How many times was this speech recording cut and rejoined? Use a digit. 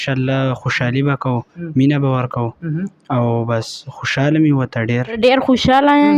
1